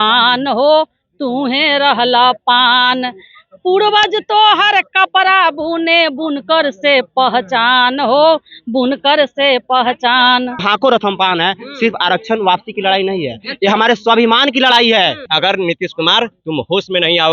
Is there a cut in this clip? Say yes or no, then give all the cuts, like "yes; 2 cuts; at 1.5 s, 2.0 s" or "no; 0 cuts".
yes; 2 cuts; at 10.7 s, 15.3 s